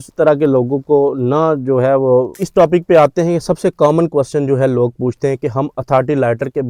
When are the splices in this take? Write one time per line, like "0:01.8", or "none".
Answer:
0:02.4